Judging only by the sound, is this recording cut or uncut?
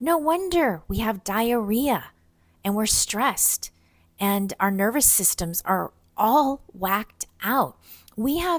uncut